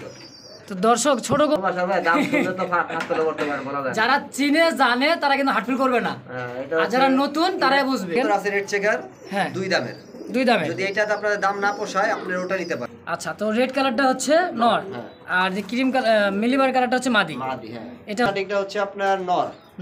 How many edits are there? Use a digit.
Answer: 4